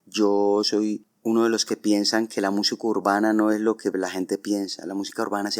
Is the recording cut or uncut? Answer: cut